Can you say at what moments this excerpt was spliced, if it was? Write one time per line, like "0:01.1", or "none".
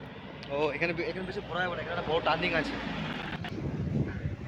0:03.2